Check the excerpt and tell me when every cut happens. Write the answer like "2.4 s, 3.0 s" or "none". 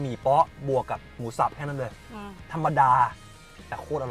2.1 s